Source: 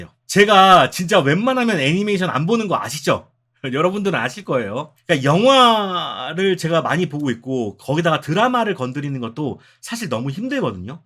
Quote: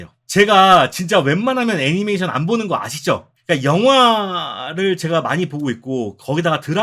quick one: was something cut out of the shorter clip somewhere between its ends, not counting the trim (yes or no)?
yes